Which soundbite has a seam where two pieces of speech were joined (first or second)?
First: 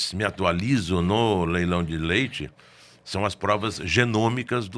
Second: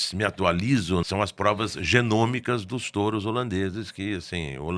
second